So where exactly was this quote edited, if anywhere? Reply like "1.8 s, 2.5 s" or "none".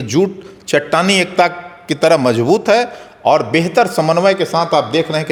none